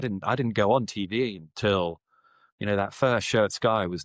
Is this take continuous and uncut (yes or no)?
yes